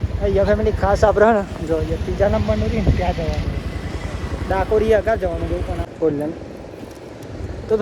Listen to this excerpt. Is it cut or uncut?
cut